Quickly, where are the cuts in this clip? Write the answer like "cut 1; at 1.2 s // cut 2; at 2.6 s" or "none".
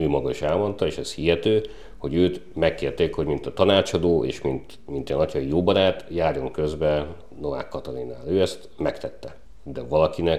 none